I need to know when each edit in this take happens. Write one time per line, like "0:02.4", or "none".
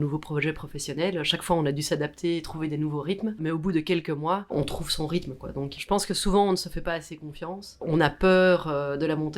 none